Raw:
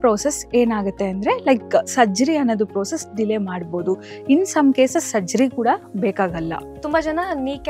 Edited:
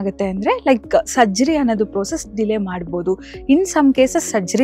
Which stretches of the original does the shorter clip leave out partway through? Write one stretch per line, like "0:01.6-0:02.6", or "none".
none

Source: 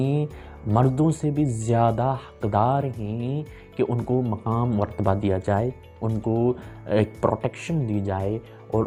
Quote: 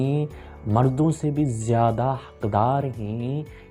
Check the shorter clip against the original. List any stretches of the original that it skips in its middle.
none

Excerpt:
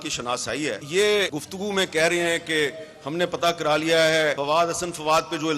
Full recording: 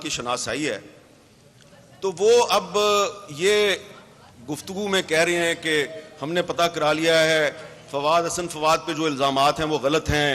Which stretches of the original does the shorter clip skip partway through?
0:00.8-0:03.3
0:03.9-0:04.5
0:07.5-0:07.9

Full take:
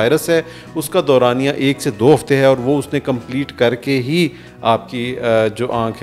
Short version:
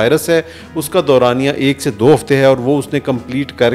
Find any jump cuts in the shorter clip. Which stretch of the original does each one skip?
none

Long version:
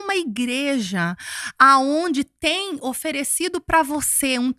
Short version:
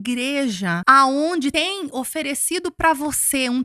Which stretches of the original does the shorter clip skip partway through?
0:01.1-0:01.5
0:02.3-0:02.4

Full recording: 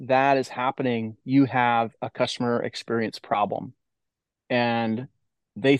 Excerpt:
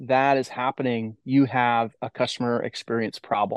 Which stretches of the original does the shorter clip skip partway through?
none

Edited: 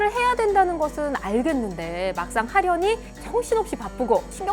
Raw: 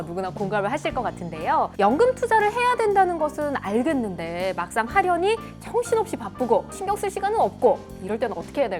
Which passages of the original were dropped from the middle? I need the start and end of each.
none

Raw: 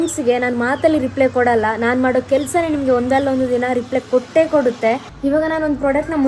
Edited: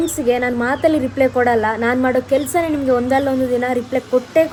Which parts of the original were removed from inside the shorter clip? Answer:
none

